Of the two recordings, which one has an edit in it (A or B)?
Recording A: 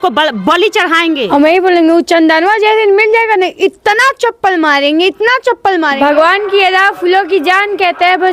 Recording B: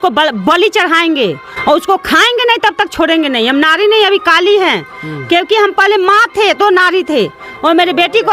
A